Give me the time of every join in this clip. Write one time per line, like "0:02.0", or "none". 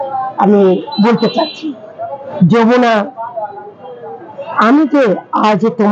0:02.3

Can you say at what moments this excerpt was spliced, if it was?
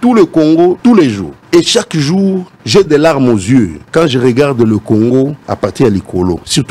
0:00.9
0:02.5
0:03.8
0:05.4

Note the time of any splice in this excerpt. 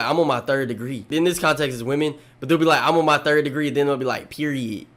0:01.0

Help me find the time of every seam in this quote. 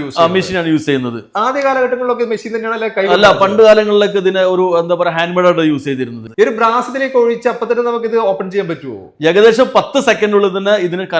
0:06.2

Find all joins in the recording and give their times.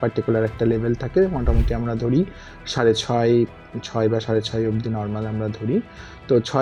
none

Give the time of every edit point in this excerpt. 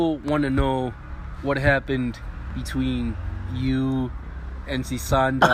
none

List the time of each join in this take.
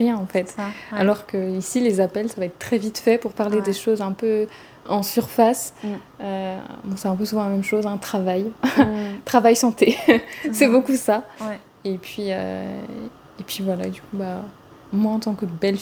none

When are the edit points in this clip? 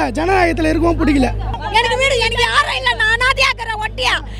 0:01.6

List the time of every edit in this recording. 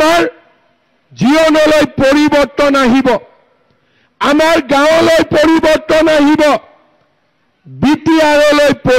none

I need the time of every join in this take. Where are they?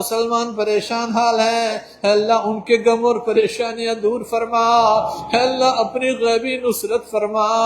none

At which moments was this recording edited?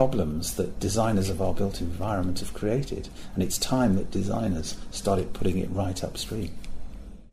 none

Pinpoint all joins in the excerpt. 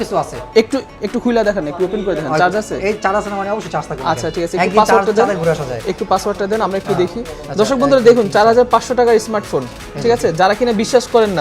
none

